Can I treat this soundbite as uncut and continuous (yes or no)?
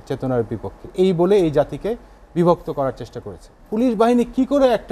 no